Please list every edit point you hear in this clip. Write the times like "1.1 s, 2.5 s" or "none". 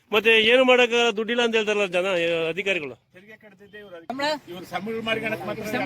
4.1 s